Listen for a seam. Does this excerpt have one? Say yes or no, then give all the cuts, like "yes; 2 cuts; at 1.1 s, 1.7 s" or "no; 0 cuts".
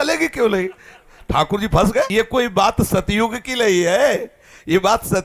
yes; 1 cut; at 2.1 s